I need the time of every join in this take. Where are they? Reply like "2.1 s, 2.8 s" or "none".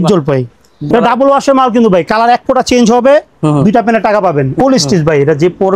0.9 s, 4.6 s